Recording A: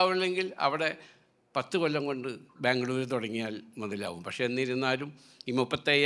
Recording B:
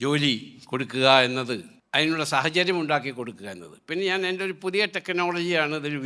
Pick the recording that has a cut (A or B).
B